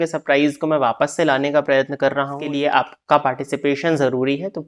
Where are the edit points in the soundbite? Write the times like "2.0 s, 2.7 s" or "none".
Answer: 2.5 s